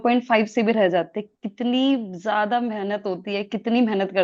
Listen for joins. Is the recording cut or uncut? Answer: uncut